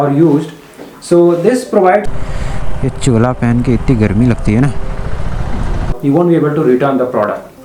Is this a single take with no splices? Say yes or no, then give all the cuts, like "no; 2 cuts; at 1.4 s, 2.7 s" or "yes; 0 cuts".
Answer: no; 2 cuts; at 2.1 s, 6.0 s